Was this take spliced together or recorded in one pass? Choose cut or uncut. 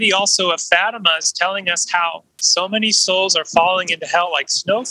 cut